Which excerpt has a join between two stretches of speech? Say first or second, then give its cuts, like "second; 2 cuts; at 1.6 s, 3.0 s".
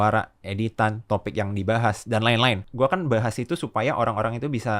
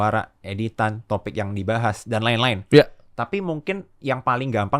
first; 1 cut; at 2.6 s